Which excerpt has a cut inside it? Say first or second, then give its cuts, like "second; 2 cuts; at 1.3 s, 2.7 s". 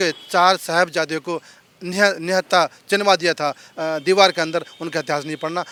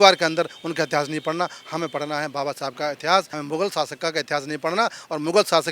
second; 1 cut; at 3.4 s